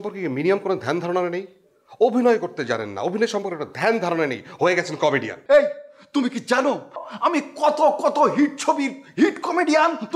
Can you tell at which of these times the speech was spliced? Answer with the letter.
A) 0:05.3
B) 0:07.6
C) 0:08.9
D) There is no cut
A